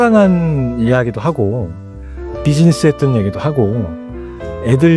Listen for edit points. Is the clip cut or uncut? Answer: uncut